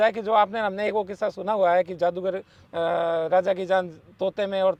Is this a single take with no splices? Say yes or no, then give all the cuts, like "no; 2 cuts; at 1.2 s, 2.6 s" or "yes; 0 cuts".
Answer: yes; 0 cuts